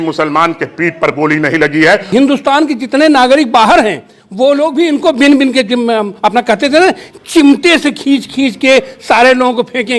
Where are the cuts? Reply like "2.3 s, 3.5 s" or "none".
2.1 s